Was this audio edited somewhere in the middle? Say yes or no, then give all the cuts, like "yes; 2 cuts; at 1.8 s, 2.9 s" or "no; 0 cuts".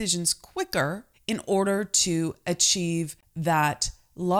yes; 2 cuts; at 1.1 s, 3.2 s